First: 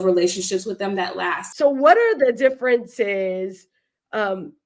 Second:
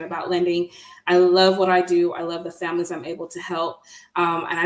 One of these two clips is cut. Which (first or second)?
first